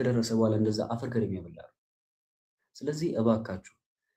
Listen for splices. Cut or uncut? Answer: uncut